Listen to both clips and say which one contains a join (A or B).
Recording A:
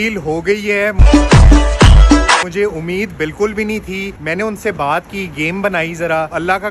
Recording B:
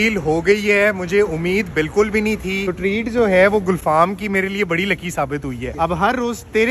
B